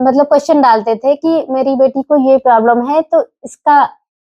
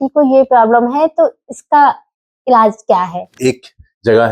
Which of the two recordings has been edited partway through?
second; 1 cut; at 3.3 s

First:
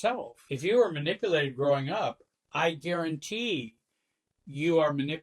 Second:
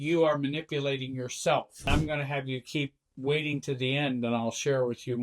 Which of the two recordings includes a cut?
second; 1 cut; at 1.9 s

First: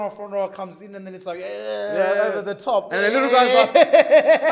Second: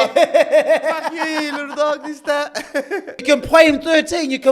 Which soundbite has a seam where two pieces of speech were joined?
second; 1 cut; at 3.1 s

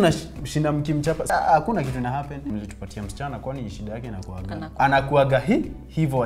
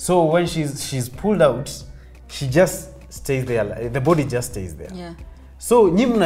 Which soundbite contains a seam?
first; 3 cuts; at 1.2 s, 2.4 s, 4.7 s

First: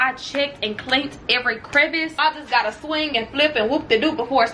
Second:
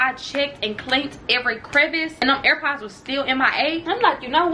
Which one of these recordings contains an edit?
first; 1 cut; at 2.2 s

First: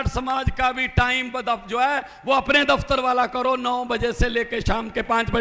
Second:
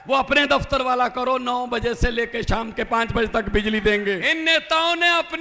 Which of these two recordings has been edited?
second; 1 cut; at 4.2 s

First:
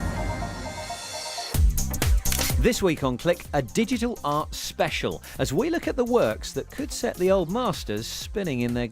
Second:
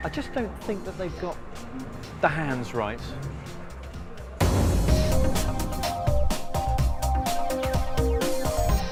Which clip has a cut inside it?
first; 2 cuts; at 1.0 s, 6.5 s

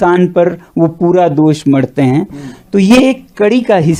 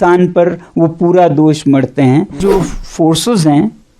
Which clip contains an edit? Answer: second; 1 cut; at 2.4 s

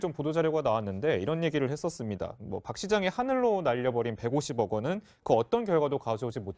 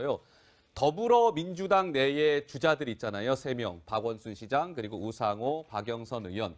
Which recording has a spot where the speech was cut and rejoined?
first; 1 cut; at 4.1 s

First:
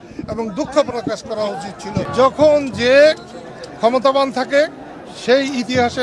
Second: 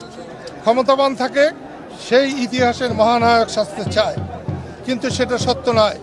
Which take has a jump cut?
first; 1 cut; at 2.1 s

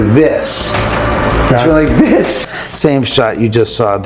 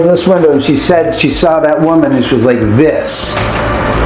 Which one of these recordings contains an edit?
first; 1 cut; at 2.5 s

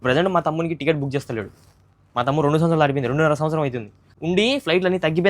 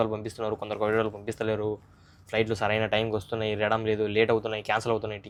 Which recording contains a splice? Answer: first; 1 cut; at 4.0 s

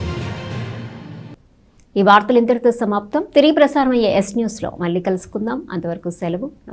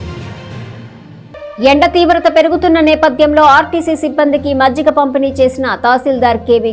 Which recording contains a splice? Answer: second; 1 cut; at 0.9 s

